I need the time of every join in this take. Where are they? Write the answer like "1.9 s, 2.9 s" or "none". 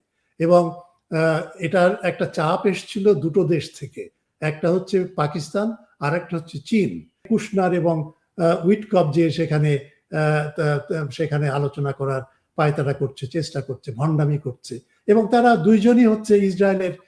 7.2 s